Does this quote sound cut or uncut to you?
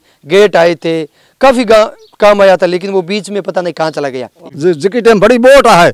cut